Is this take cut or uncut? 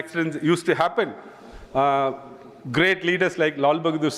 uncut